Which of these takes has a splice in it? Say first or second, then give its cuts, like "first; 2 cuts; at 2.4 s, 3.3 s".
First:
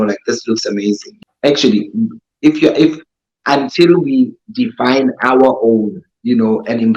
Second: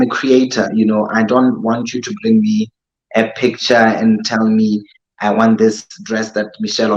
first; 1 cut; at 1.1 s